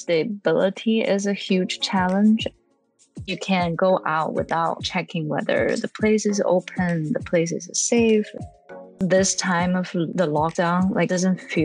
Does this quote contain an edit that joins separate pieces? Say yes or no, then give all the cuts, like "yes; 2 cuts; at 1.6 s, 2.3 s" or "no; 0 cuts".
yes; 2 cuts; at 2.8 s, 8.6 s